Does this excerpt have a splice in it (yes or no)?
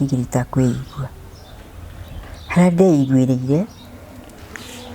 no